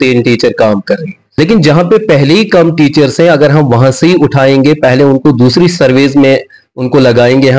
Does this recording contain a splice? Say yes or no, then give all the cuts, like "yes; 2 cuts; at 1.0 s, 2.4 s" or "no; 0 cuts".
yes; 1 cut; at 1.2 s